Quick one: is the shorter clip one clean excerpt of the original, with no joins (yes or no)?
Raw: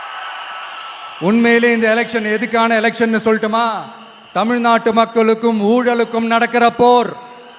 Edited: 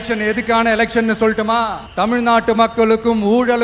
no